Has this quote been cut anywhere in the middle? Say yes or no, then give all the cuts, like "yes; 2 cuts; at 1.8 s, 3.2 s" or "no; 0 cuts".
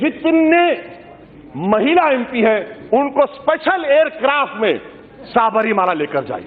no; 0 cuts